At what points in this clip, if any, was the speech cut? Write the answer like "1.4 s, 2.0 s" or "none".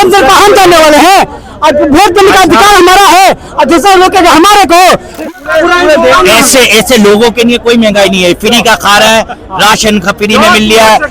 5.2 s